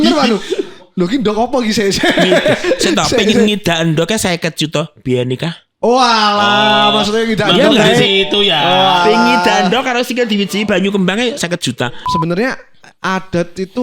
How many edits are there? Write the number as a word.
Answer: one